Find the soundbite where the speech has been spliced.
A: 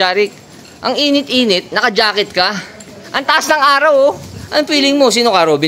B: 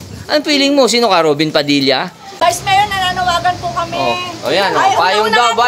B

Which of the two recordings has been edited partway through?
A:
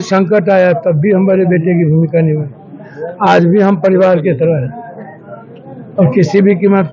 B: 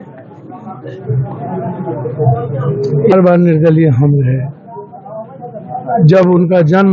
B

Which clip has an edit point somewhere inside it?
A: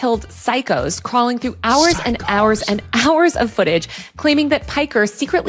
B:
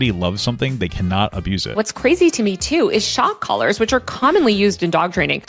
B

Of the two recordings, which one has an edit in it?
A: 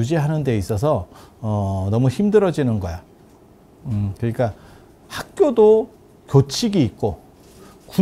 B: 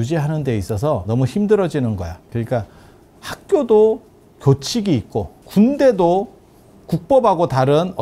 B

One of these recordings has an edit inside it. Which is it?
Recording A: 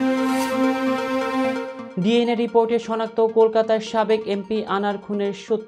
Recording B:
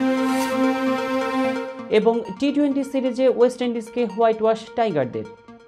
A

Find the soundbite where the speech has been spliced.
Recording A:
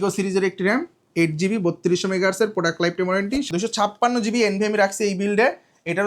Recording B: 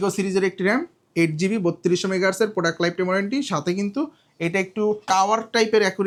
A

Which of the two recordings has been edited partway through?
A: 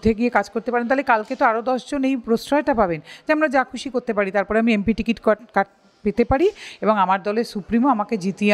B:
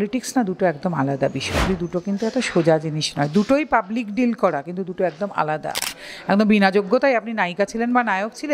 B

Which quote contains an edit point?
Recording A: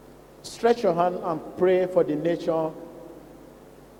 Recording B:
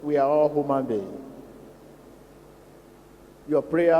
B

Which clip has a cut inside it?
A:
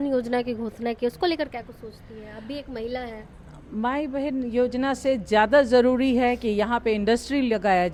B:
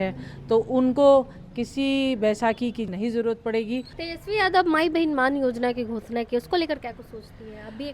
B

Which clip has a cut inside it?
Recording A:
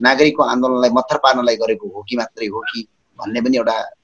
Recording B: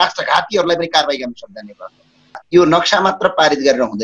B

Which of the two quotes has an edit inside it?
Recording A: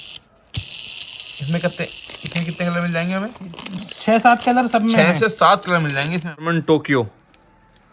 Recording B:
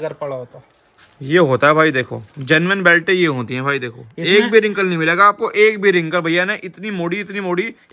A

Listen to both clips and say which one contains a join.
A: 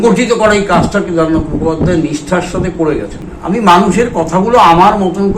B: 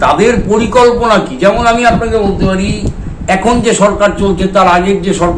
A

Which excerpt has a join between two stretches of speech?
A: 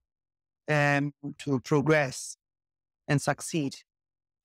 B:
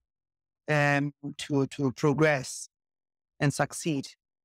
A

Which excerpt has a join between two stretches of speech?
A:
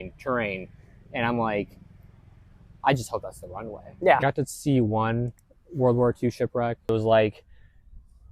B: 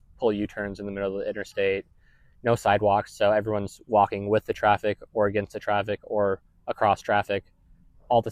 A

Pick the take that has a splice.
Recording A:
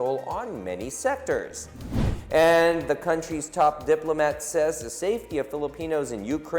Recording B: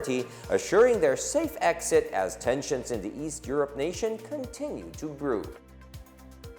B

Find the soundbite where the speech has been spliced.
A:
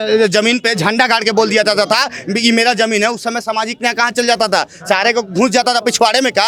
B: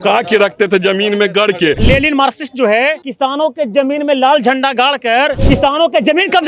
B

